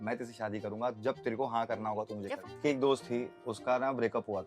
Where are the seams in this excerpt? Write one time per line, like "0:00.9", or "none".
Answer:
0:02.4